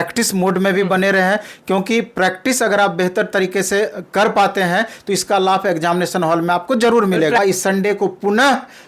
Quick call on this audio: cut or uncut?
cut